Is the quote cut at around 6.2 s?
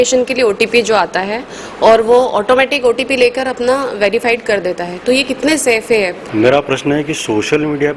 yes; 1 cut; at 6.2 s

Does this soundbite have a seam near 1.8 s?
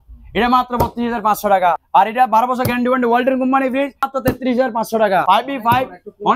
yes; 3 cuts; at 1.8 s, 4.1 s, 5.2 s

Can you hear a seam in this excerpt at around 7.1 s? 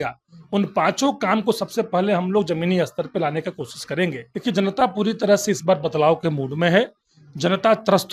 no; 1 cut; at 4.3 s

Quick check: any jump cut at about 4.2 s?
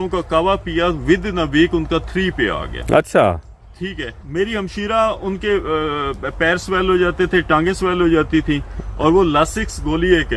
yes; 1 cut; at 4.2 s

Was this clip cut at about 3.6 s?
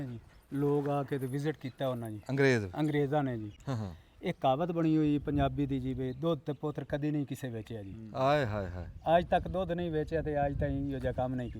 yes; 1 cut; at 3.6 s

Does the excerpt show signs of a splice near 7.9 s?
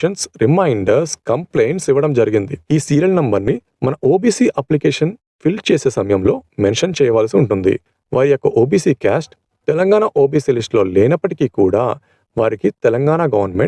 yes; 2 cuts; at 2.6 s, 7.9 s

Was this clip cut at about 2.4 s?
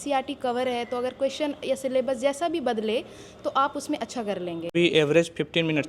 no; 1 cut; at 4.7 s

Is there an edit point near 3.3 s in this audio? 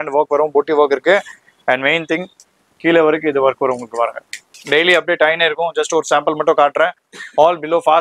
no; 1 cut; at 4.5 s

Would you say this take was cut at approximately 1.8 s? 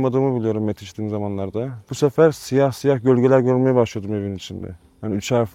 yes; 1 cut; at 1.8 s

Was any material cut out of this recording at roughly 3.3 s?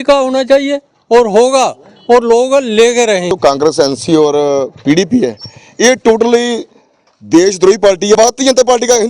yes; 2 cuts; at 3.3 s, 8.2 s

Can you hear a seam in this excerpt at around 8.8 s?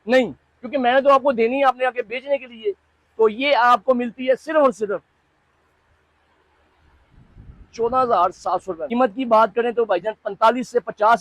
yes; 1 cut; at 8.8 s

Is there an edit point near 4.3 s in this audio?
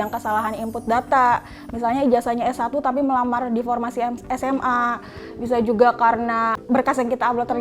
no; 1 cut; at 6.6 s

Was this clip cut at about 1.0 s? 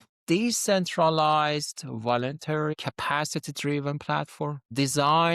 no; 1 cut; at 2.8 s

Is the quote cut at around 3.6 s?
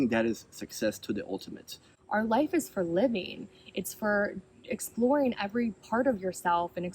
no; 1 cut; at 1.9 s

